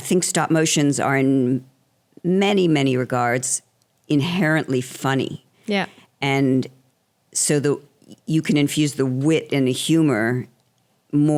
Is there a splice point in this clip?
no; 0 cuts

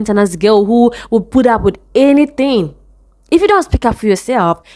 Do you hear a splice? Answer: no; 0 cuts

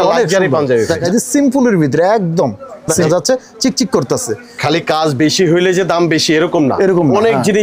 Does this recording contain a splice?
yes; 2 cuts; at 0.9 s, 3.1 s

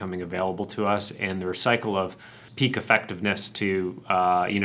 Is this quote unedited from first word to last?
no; 1 cut; at 2.4 s

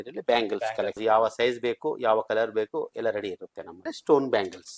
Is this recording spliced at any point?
yes; 2 cuts; at 1.0 s, 3.9 s

